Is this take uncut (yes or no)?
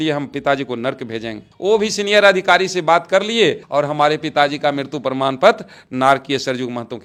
yes